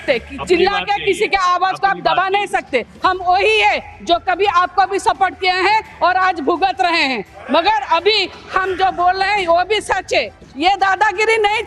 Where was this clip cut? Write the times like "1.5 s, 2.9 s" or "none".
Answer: 10.5 s